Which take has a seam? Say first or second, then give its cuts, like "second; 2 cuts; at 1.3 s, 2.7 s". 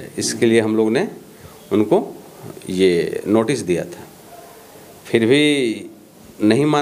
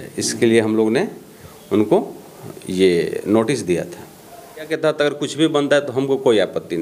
second; 1 cut; at 4.7 s